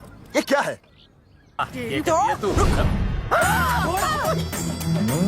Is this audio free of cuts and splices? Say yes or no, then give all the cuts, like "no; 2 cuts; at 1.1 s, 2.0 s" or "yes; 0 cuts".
no; 1 cut; at 1.7 s